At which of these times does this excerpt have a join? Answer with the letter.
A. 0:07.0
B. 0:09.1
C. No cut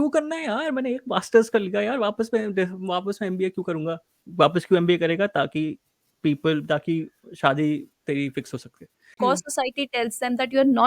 B